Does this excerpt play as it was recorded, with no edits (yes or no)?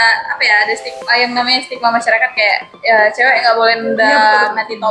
yes